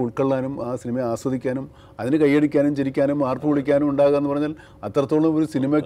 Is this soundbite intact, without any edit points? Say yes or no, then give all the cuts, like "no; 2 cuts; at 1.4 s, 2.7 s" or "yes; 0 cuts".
yes; 0 cuts